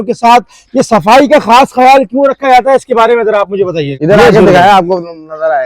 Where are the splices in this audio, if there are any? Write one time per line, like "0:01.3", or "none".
0:03.9